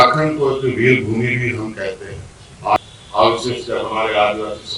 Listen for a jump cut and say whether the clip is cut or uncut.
cut